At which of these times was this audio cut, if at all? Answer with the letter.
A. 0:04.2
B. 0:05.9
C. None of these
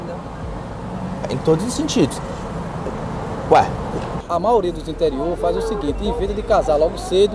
A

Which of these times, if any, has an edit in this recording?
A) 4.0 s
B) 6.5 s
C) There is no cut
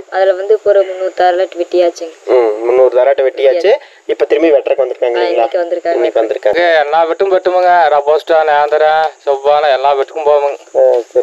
B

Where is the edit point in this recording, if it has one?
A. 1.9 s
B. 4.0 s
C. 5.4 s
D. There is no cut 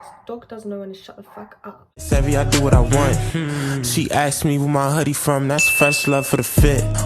A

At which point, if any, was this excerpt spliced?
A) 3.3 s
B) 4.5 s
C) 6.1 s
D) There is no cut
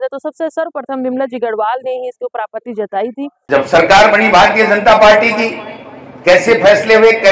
A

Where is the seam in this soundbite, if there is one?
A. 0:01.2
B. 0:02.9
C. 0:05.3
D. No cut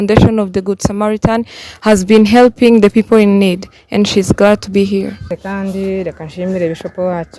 C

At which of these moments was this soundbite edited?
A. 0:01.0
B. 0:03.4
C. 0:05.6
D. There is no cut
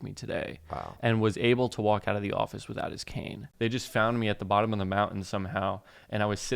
B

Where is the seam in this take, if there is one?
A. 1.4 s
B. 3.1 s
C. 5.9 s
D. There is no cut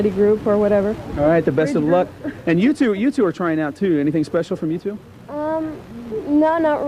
A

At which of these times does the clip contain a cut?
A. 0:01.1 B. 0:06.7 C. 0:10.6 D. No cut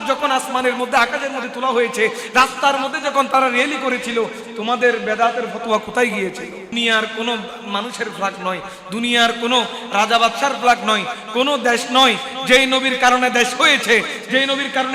B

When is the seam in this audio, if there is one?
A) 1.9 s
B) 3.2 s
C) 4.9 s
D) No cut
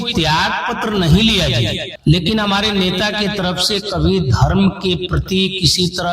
A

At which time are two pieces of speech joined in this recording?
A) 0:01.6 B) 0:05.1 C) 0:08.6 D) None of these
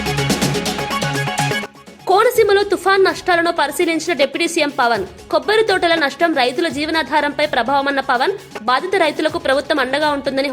A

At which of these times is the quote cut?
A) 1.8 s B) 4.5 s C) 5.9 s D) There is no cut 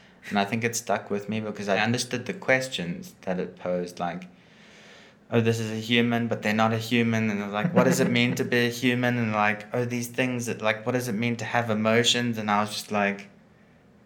A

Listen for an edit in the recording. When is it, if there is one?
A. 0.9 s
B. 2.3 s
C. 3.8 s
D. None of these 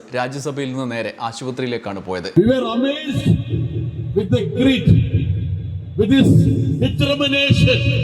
B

